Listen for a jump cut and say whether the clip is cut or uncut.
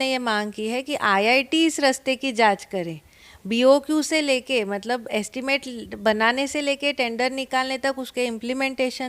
uncut